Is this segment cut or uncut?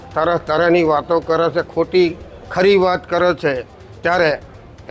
uncut